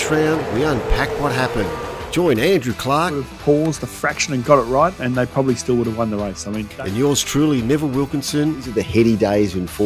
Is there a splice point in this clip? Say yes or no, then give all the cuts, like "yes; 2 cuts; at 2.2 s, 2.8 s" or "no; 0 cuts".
no; 0 cuts